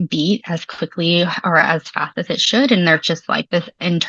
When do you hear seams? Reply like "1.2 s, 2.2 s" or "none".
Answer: 1.6 s